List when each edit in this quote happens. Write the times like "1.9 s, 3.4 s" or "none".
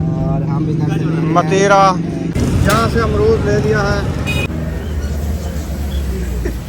2.3 s, 4.7 s